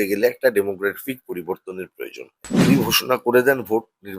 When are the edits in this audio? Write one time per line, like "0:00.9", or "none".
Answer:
0:02.6